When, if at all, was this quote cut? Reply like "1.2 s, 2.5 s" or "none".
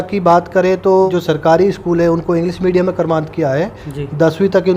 1.1 s